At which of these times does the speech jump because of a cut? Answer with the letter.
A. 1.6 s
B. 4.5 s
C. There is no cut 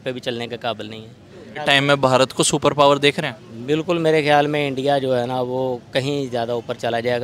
A